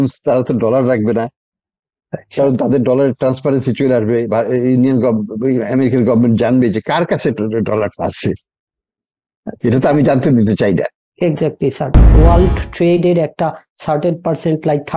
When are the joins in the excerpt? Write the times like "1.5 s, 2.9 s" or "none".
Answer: 12.1 s